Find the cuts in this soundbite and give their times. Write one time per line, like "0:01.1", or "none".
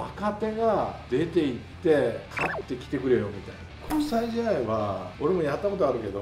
0:01.0
0:02.3
0:03.9
0:05.1